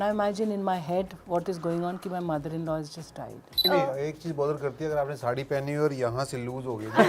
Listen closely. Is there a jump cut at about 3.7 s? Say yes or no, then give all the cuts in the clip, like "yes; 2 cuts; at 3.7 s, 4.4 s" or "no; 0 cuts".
yes; 1 cut; at 3.7 s